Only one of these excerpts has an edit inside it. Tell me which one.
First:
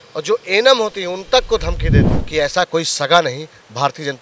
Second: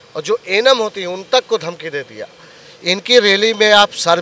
first; 1 cut; at 2.2 s

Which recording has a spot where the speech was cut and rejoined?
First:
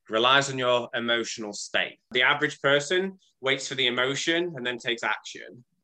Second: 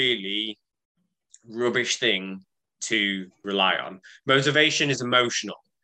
first; 1 cut; at 2.0 s

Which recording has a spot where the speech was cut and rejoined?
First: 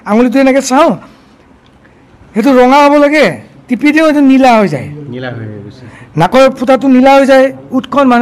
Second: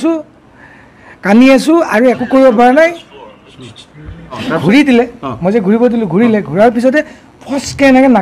second; 1 cut; at 4.3 s

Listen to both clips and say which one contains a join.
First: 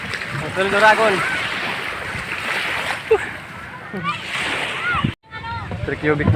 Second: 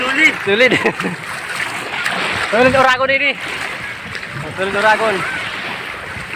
first; 1 cut; at 5.3 s

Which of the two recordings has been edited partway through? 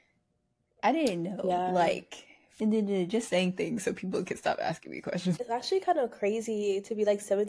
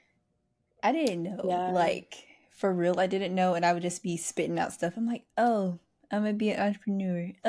first; 2 cuts; at 2.4 s, 5.4 s

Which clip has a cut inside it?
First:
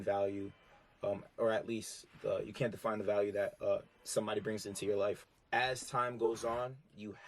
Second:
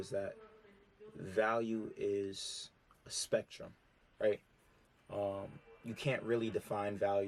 first; 1 cut; at 5.2 s

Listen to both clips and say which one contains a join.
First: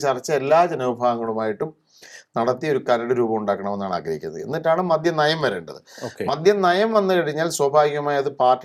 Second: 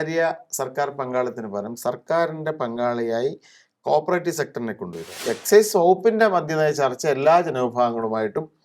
second; 1 cut; at 5.2 s

